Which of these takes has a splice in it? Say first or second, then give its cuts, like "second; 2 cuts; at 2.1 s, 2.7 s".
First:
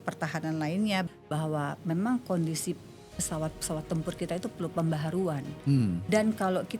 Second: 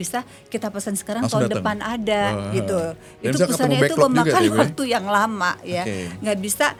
first; 1 cut; at 1.1 s